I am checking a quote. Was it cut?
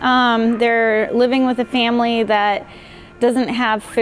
no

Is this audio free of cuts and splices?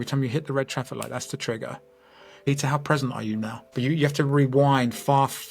no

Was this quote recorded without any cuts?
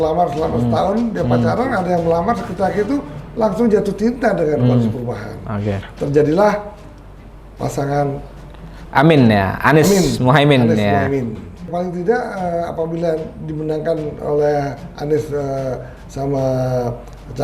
no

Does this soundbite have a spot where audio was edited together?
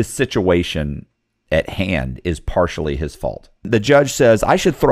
yes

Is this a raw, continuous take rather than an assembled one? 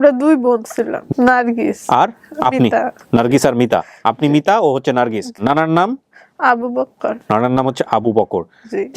no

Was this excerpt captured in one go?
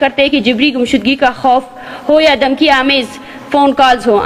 yes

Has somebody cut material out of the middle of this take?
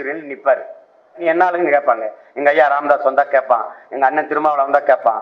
yes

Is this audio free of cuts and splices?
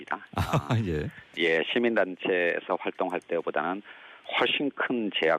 yes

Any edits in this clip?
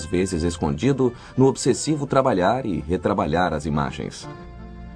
yes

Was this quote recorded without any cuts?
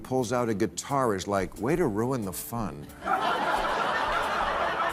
yes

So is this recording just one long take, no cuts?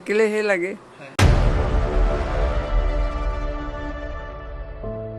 yes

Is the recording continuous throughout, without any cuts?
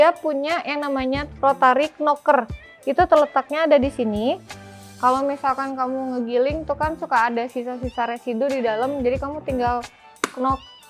no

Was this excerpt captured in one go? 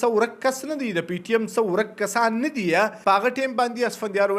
no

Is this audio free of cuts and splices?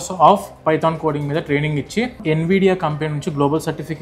no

